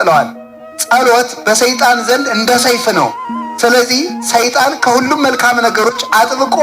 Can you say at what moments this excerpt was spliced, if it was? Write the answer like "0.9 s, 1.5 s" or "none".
none